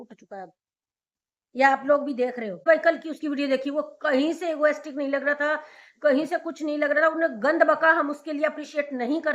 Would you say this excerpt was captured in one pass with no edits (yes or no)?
no